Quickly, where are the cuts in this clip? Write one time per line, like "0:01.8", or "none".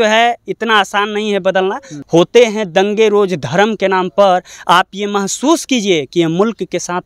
0:01.9